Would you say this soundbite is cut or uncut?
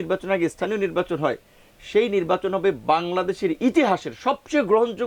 uncut